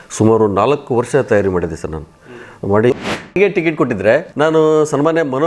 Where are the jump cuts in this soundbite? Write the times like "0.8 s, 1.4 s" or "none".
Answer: 3.4 s, 4.3 s